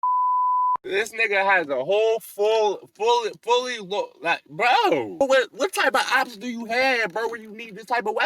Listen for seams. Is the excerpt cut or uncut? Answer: cut